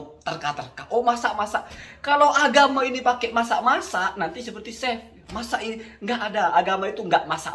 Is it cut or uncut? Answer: uncut